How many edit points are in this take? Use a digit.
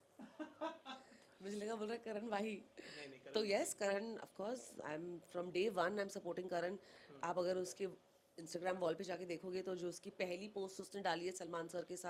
0